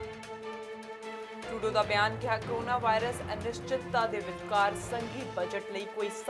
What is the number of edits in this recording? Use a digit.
1